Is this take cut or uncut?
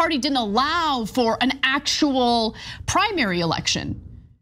cut